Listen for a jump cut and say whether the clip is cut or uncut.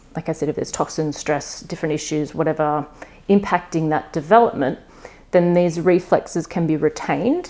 uncut